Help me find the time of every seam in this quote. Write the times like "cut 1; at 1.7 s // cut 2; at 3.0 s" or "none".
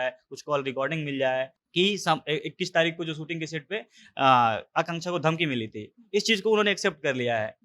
cut 1; at 1.6 s